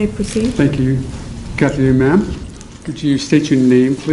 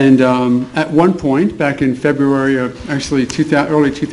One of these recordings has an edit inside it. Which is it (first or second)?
first